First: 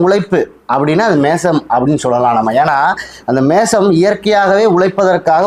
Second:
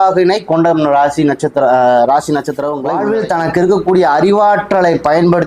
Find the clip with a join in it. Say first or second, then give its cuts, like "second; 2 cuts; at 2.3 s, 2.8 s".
second; 1 cut; at 3.0 s